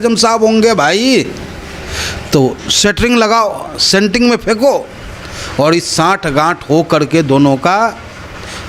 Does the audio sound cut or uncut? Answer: uncut